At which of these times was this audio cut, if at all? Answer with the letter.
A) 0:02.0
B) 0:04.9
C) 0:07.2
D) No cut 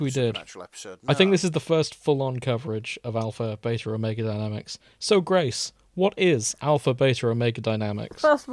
D